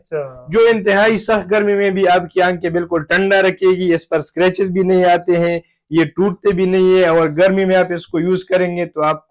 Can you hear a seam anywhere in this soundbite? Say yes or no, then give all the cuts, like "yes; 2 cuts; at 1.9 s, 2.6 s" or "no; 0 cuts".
no; 0 cuts